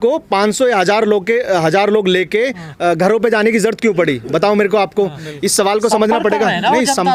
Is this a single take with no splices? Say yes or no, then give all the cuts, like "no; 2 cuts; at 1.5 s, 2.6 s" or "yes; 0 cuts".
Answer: yes; 0 cuts